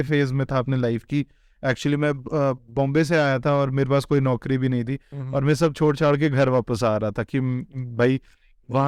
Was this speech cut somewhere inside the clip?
no; 0 cuts

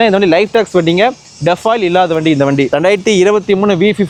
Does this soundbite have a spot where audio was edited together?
no; 0 cuts

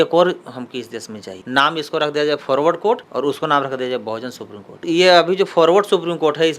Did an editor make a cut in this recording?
yes; 2 cuts; at 1.3 s, 4.8 s

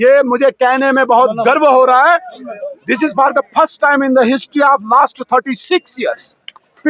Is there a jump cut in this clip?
no; 0 cuts

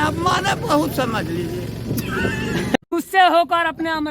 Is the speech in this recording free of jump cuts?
no; 1 cut; at 2.8 s

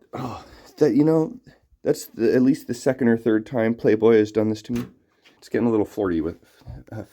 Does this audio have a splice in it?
yes; 1 cut; at 5.4 s

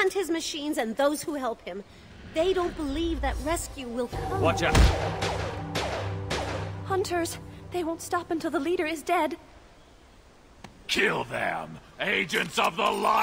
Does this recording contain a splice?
no; 0 cuts

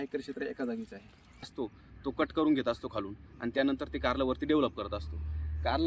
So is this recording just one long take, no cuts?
no; 1 cut; at 1.5 s

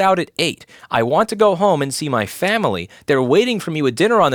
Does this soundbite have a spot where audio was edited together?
no; 0 cuts

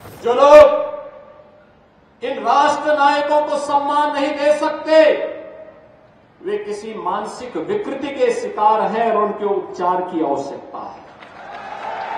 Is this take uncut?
yes; 0 cuts

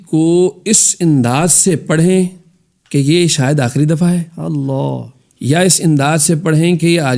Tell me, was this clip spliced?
no; 0 cuts

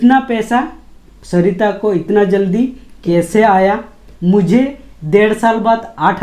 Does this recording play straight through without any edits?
yes; 0 cuts

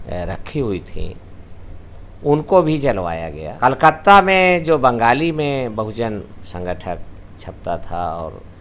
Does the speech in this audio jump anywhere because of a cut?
yes; 1 cut; at 3.4 s

